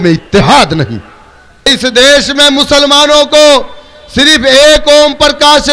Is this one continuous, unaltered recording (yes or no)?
no